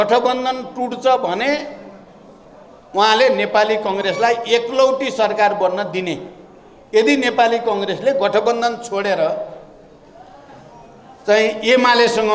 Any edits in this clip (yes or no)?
no